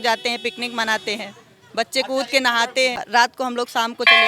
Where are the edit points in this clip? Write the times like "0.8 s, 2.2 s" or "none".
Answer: 3.0 s